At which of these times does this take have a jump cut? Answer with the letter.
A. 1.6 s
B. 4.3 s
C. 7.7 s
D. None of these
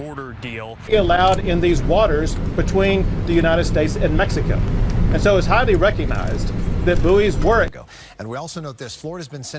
C